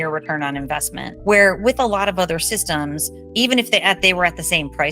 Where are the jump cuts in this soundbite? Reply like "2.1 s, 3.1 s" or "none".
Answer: 1.0 s